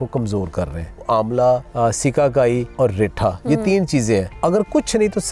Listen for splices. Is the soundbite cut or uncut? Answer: cut